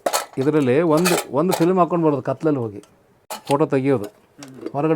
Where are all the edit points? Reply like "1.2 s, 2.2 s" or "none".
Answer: 3.4 s

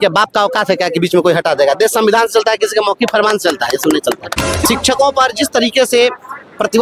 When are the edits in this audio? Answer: 4.5 s

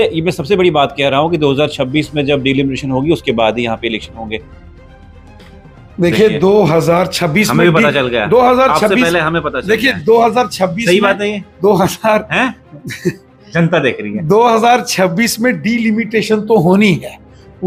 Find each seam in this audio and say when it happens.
none

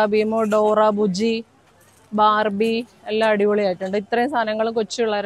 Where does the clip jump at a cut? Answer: none

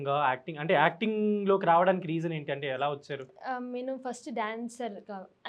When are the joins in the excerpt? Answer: none

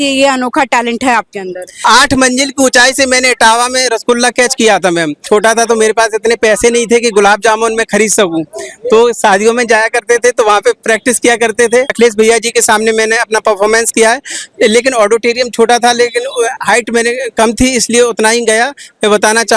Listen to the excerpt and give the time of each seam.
1.6 s, 5.2 s, 11.9 s

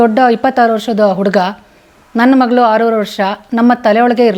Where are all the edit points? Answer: none

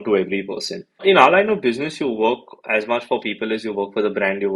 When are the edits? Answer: 1.0 s

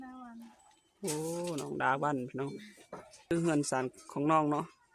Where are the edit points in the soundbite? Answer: 3.2 s

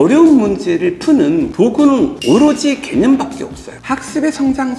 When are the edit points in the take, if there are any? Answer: 1.8 s, 3.7 s

